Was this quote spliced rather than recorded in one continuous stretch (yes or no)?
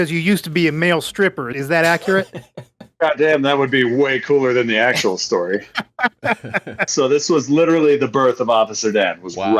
yes